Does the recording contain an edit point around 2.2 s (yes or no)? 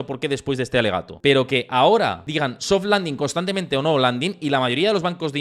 yes